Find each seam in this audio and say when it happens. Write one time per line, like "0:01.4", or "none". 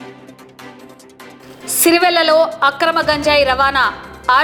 none